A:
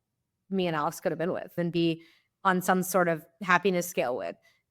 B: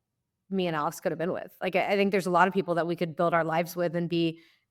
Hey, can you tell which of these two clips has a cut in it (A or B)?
A